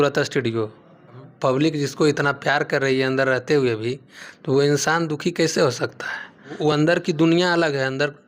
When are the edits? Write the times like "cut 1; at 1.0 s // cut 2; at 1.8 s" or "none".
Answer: cut 1; at 1.3 s // cut 2; at 6.5 s